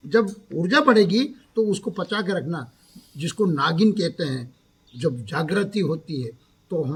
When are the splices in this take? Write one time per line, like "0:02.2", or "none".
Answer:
none